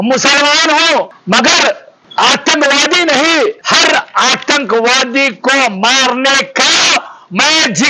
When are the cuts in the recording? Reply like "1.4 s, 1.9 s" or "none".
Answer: 1.2 s, 1.9 s, 3.6 s